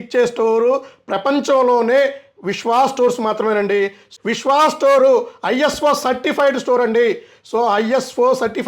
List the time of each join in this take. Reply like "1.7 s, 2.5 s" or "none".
4.1 s